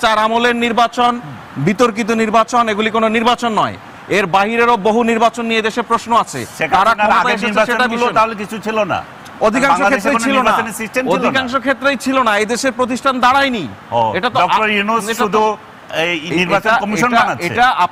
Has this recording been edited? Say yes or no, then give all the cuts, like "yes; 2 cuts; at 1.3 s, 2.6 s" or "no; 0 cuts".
no; 0 cuts